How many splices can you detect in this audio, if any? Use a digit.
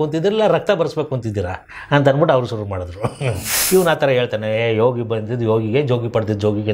1